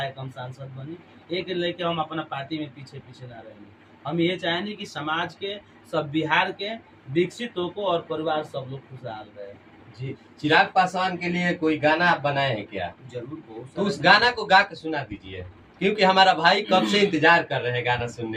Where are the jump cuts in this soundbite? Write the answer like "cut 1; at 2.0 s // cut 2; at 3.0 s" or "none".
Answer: none

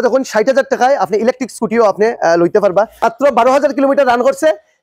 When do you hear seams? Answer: cut 1; at 2.9 s

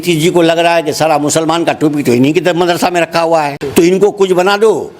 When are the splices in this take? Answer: cut 1; at 3.6 s

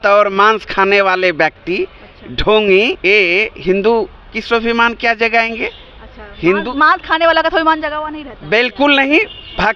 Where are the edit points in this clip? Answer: none

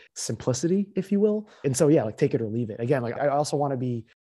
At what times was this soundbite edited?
cut 1; at 1.5 s // cut 2; at 3.2 s

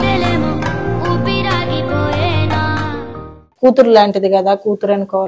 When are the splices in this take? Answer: cut 1; at 3.5 s

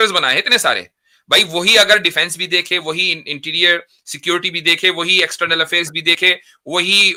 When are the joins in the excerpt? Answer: none

